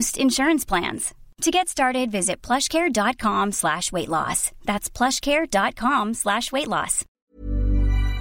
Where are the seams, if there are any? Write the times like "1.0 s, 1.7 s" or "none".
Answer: 7.1 s